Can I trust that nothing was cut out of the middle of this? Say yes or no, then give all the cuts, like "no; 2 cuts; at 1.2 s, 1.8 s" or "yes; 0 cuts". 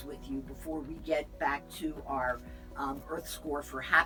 yes; 0 cuts